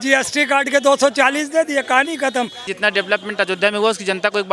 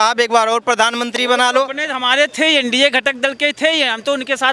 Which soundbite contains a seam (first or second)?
first